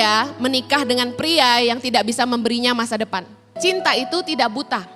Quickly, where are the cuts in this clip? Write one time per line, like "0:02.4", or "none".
0:03.6